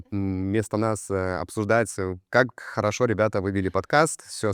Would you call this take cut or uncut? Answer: uncut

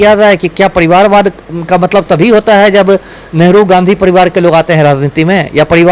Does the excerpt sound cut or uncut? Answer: uncut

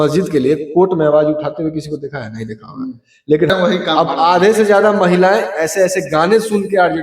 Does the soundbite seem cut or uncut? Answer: cut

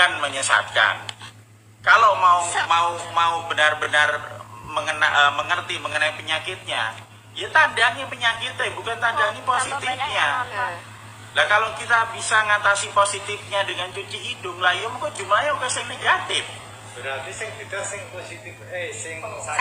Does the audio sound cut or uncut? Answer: uncut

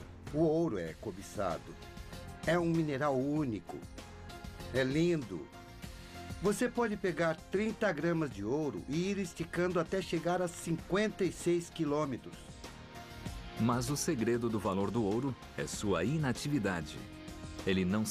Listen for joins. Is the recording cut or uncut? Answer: uncut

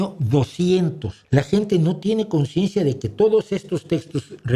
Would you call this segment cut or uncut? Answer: cut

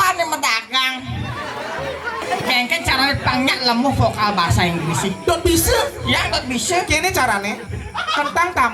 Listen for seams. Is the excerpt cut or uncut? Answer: cut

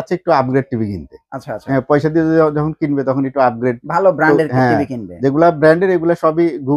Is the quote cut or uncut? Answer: uncut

